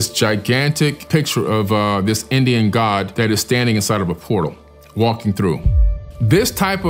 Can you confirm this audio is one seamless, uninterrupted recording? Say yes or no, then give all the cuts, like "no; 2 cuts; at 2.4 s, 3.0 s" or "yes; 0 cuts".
no; 1 cut; at 6.0 s